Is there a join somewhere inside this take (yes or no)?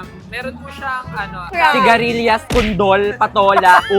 yes